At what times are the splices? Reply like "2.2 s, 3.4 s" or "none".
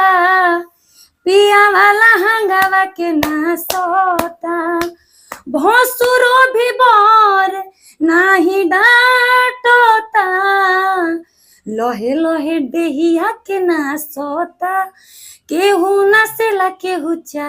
none